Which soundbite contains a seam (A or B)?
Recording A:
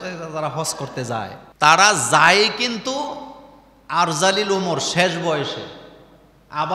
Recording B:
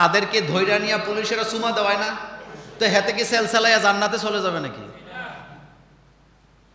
A